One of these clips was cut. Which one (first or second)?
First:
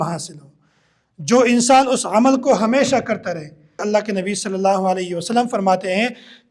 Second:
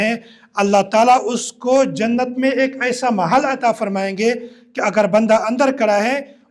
first